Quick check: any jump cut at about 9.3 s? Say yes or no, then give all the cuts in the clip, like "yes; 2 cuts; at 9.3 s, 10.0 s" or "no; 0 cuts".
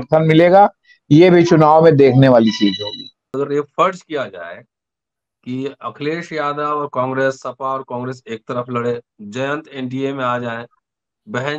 no; 1 cut; at 3.3 s